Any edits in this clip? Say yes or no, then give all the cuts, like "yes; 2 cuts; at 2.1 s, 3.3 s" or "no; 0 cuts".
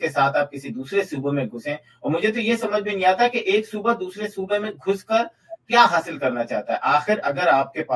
no; 0 cuts